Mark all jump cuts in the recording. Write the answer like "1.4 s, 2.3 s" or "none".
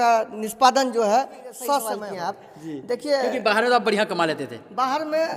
2.0 s